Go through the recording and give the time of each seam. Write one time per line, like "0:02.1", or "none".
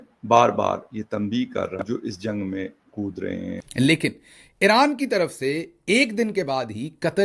0:01.8
0:03.6